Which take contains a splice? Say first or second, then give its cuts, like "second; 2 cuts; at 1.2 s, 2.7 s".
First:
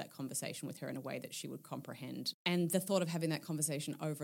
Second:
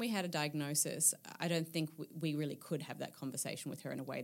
first; 1 cut; at 2.4 s